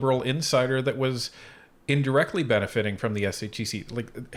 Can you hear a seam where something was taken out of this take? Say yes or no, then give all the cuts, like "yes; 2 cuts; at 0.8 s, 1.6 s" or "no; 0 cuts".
no; 0 cuts